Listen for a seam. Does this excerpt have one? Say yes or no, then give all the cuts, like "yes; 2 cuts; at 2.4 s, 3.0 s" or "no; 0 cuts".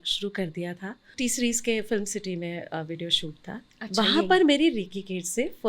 yes; 1 cut; at 1.1 s